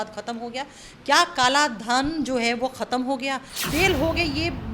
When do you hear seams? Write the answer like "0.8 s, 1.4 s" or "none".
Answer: 3.5 s